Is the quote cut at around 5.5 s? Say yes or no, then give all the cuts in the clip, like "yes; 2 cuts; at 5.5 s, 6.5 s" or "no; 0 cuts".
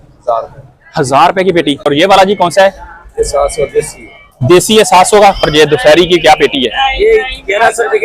yes; 2 cuts; at 1.9 s, 5.5 s